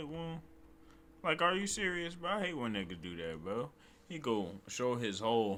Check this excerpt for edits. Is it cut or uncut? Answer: uncut